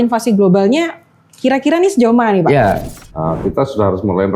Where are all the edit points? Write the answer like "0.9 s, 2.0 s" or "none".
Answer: 2.9 s